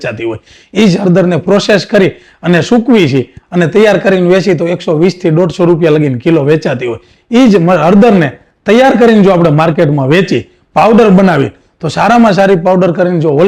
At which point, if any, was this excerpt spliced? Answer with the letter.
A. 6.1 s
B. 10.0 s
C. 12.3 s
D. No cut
D